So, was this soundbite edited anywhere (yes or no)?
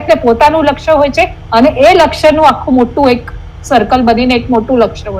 no